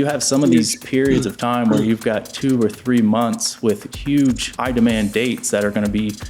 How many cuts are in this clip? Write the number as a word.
one